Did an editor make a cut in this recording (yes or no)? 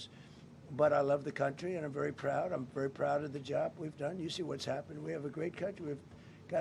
no